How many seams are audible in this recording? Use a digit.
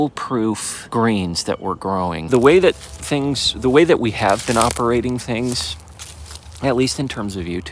1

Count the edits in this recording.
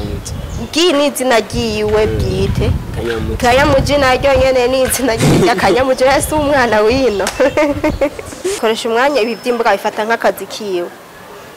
1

